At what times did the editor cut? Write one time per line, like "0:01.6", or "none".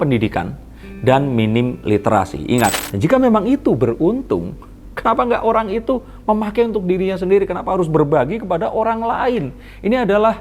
0:02.8